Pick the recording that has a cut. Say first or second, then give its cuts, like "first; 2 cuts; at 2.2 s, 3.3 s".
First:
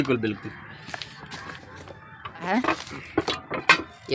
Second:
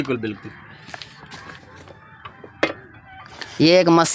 first; 1 cut; at 2.5 s